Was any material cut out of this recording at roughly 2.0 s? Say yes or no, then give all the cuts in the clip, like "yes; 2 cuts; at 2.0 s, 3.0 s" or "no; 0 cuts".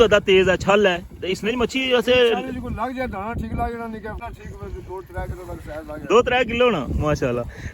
no; 1 cut; at 4.2 s